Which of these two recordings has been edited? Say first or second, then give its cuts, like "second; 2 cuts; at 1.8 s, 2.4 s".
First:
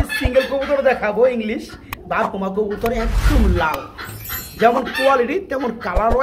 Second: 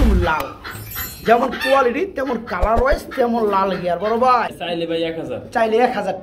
second; 1 cut; at 4.6 s